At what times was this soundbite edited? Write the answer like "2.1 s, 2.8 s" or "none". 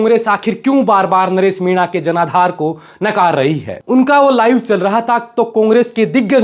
3.7 s